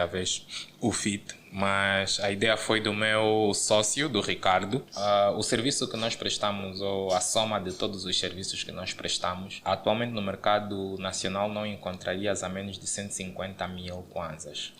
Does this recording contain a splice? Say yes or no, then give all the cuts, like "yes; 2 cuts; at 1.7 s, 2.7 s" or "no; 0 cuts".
yes; 1 cut; at 4.9 s